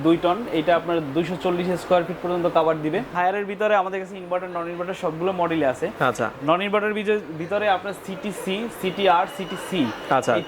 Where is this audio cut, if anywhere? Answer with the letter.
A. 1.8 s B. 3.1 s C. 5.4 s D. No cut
B